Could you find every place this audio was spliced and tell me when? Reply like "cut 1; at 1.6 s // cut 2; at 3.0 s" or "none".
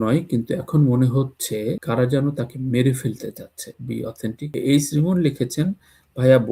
cut 1; at 4.5 s

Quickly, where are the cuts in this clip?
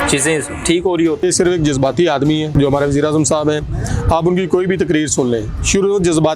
cut 1; at 1.2 s // cut 2; at 2.5 s

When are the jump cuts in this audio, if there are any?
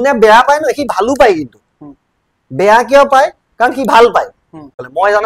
none

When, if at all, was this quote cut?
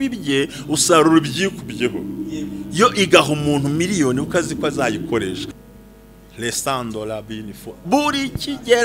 cut 1; at 5.5 s

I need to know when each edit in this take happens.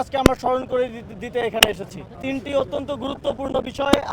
cut 1; at 2.2 s

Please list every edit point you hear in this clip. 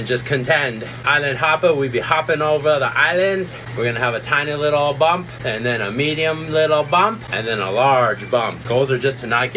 cut 1; at 1.0 s // cut 2; at 3.6 s // cut 3; at 5.3 s // cut 4; at 7.3 s // cut 5; at 8.6 s

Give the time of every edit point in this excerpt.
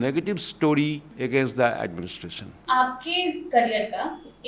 cut 1; at 1.1 s // cut 2; at 2.5 s // cut 3; at 3.4 s

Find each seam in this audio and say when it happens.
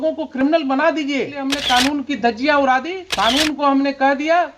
cut 1; at 1.5 s // cut 2; at 3.0 s

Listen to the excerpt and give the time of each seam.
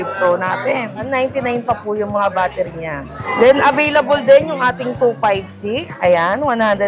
cut 1; at 1.1 s // cut 2; at 3.2 s // cut 3; at 5.9 s

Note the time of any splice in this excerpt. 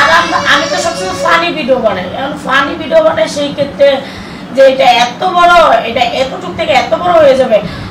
none

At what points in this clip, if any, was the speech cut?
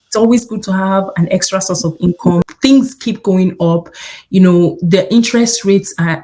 cut 1; at 2.5 s

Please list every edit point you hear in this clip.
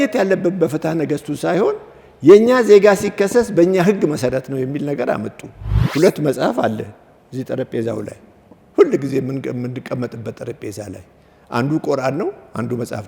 cut 1; at 5.8 s

